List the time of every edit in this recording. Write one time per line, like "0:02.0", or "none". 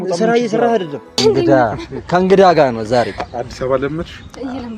0:01.2